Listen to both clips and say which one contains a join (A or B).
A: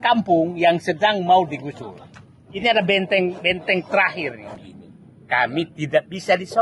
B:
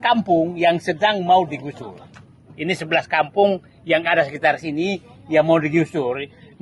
A